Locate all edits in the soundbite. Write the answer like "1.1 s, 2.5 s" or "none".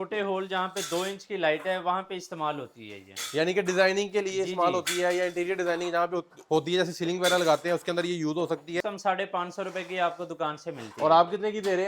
8.8 s